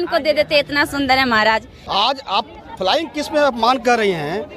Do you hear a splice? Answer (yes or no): yes